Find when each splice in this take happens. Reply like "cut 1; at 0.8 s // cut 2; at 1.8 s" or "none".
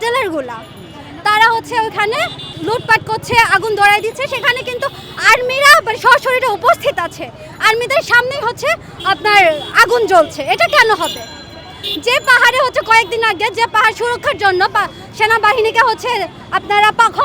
cut 1; at 2.4 s

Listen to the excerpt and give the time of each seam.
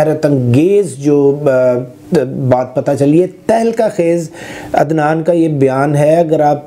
none

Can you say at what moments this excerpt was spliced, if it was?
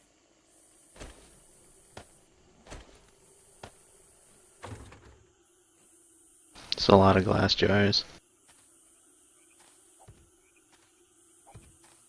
cut 1; at 2.0 s

